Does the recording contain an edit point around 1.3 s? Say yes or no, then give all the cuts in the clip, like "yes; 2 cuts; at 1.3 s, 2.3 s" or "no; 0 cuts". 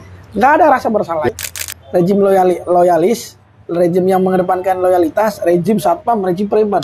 yes; 1 cut; at 1.3 s